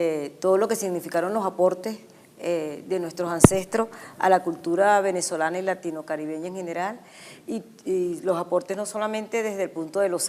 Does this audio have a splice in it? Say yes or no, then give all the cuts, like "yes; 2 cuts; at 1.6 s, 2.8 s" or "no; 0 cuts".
yes; 1 cut; at 7.8 s